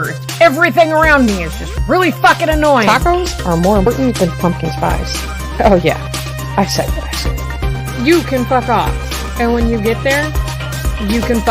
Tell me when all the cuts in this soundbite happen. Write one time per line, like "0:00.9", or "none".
0:03.9